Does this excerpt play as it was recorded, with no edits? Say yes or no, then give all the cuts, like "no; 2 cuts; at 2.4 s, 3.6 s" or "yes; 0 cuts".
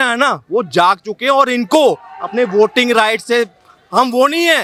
yes; 0 cuts